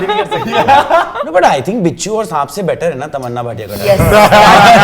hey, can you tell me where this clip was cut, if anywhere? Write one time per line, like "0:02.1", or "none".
0:01.2